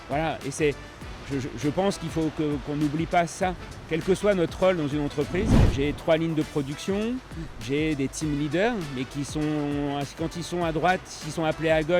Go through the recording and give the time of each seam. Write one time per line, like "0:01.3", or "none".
0:05.6